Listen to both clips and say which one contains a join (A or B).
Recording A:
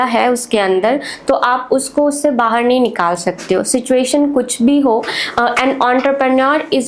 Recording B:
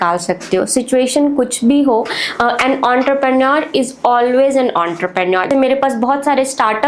B